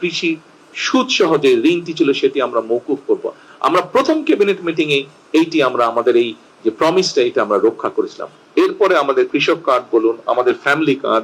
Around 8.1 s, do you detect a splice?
no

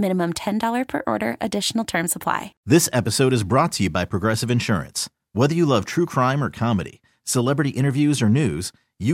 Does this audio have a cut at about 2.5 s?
yes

